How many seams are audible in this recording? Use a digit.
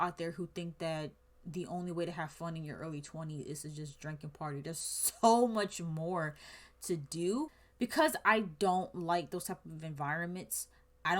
1